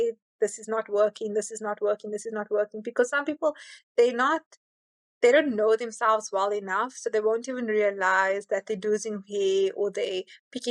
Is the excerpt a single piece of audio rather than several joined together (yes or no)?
yes